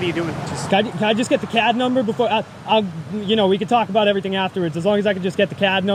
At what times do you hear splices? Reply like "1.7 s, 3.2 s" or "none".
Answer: none